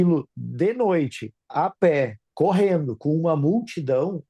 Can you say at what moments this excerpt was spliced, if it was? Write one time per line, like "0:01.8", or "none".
0:02.2